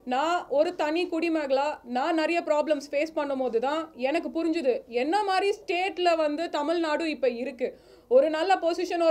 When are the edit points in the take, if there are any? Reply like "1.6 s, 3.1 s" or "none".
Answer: none